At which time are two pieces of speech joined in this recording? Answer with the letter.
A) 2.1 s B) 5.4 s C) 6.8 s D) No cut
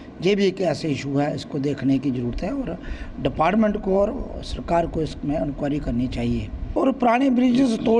C